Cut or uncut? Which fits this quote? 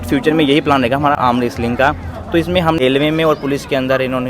cut